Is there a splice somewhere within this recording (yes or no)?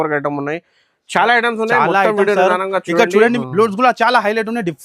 yes